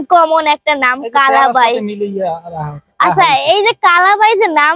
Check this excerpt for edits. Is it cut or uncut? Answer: uncut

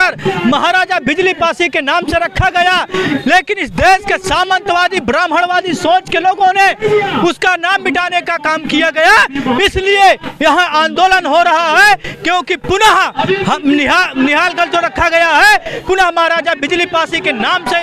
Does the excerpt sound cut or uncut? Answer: uncut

